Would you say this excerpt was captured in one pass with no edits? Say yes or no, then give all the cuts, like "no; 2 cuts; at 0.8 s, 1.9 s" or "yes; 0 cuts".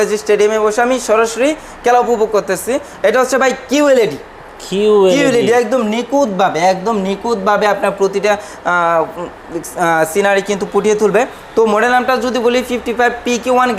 yes; 0 cuts